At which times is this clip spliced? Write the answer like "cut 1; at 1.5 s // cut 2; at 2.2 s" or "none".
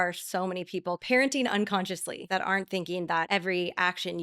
cut 1; at 1.0 s // cut 2; at 2.1 s // cut 3; at 3.3 s